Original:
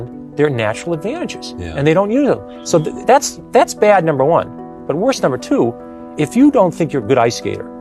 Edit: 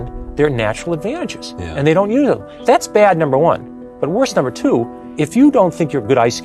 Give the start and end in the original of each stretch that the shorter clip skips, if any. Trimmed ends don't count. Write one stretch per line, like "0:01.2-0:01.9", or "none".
0:02.5-0:03.4
0:05.9-0:06.0